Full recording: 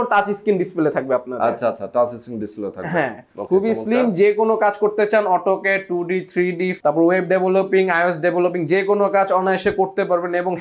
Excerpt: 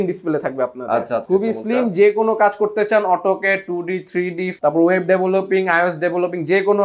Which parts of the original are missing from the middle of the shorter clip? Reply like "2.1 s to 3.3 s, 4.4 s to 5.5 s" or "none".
1.8 s to 3.5 s